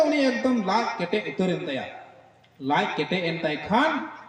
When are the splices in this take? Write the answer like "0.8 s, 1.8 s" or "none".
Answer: none